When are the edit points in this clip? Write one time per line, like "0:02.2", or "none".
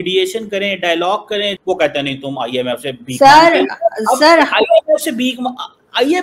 0:01.5